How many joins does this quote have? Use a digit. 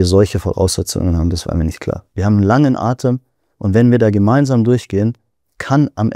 1